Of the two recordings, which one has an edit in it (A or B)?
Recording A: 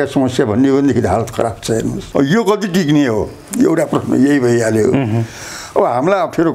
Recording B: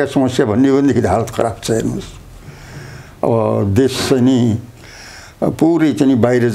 A